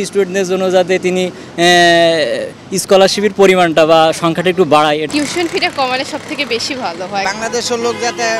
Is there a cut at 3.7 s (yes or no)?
no